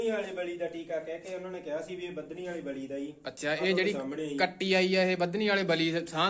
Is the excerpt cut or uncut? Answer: uncut